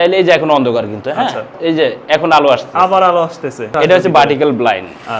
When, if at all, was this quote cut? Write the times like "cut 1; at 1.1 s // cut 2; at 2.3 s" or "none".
cut 1; at 1.5 s // cut 2; at 3.7 s